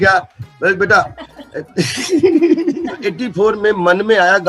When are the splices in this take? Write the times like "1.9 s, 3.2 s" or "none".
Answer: 2.9 s